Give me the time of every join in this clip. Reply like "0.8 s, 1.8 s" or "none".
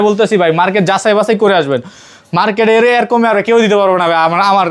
none